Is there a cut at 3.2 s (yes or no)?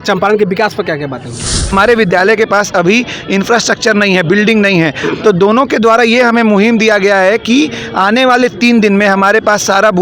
no